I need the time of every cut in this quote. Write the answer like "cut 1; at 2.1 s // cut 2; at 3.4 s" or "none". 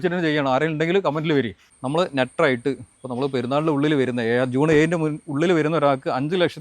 cut 1; at 1.7 s